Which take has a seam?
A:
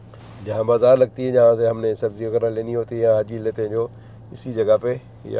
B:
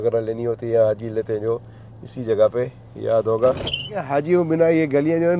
B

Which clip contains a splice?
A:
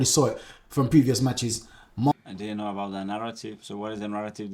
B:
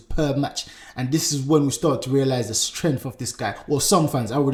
A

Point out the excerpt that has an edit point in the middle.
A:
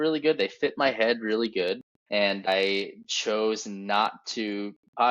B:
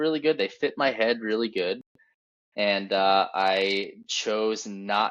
A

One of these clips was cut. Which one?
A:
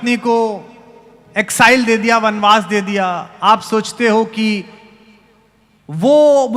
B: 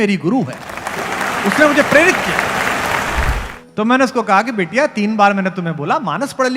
B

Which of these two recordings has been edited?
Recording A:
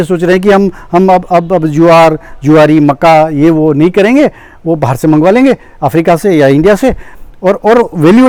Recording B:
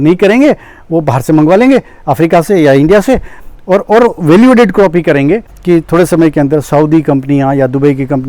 B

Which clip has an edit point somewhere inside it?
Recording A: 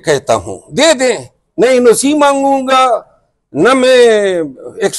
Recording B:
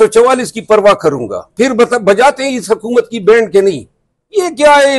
B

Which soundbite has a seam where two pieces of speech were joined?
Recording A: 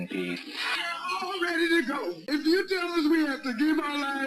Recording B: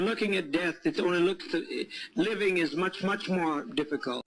A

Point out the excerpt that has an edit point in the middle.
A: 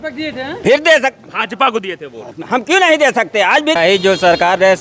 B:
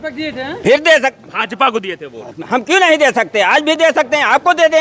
A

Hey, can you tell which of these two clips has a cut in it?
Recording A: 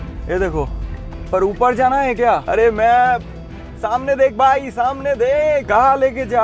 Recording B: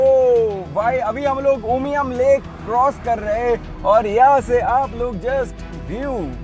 A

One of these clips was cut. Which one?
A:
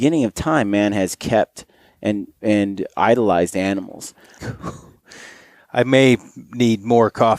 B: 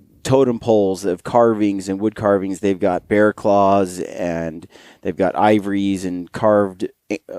A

